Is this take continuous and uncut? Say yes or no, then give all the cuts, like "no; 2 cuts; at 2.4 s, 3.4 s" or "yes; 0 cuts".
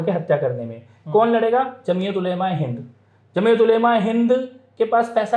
yes; 0 cuts